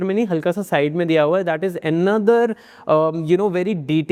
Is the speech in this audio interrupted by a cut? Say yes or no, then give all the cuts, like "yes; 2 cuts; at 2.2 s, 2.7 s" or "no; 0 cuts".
no; 0 cuts